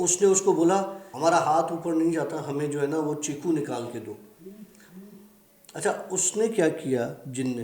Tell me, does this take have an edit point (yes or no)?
yes